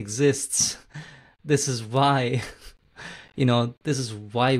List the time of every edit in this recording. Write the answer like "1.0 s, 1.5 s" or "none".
none